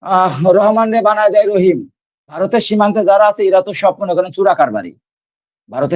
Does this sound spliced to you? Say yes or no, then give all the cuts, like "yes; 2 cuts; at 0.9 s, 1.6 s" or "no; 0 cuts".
yes; 1 cut; at 2.4 s